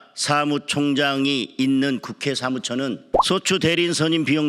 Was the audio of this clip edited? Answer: yes; 1 cut; at 3.1 s

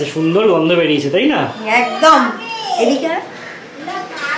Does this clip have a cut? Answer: no; 0 cuts

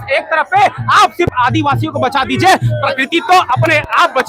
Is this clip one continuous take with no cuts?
yes; 0 cuts

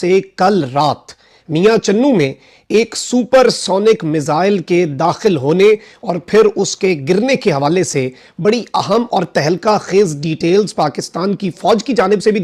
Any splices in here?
no; 0 cuts

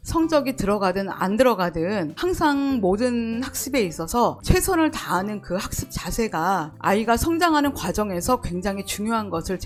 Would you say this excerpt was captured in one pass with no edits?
yes; 0 cuts

